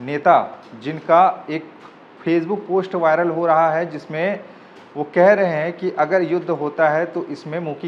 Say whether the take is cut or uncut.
uncut